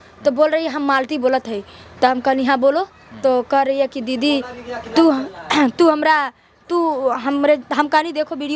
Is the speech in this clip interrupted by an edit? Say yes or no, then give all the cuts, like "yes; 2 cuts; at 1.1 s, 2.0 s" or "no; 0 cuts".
no; 0 cuts